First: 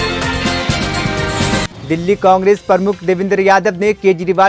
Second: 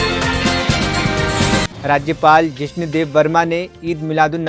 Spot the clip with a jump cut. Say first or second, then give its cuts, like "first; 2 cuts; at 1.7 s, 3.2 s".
second; 1 cut; at 1.7 s